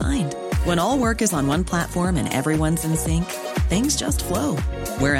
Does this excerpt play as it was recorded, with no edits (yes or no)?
yes